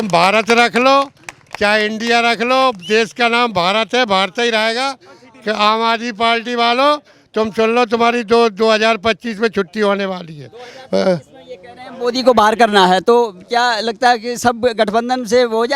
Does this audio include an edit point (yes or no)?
no